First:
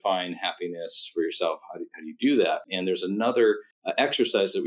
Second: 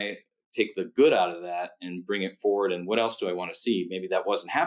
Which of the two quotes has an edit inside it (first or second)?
first